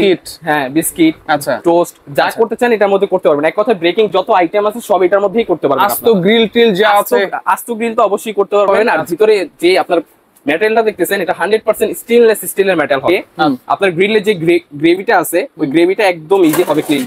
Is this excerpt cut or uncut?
cut